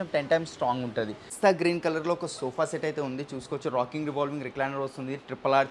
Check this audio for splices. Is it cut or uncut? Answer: cut